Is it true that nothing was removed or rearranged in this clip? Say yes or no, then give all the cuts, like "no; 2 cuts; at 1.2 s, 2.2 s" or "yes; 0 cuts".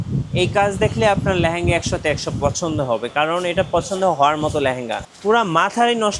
no; 1 cut; at 4.9 s